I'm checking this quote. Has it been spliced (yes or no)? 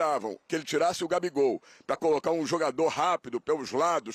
no